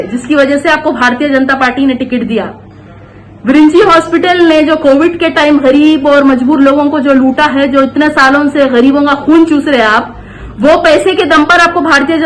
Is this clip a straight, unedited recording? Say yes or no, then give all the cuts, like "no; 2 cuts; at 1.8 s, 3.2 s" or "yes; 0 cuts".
yes; 0 cuts